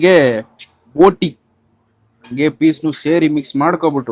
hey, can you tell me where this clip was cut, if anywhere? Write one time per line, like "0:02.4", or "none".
none